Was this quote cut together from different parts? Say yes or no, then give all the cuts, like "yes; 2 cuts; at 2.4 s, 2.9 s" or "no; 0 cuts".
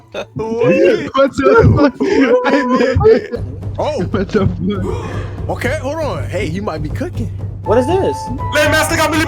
yes; 2 cuts; at 3.4 s, 7.6 s